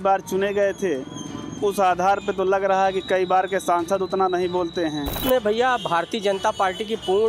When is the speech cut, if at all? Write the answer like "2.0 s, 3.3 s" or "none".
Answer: 5.2 s